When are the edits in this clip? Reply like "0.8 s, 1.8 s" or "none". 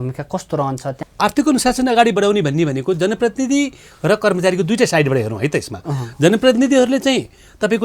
1.0 s